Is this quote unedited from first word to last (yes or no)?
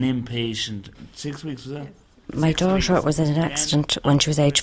no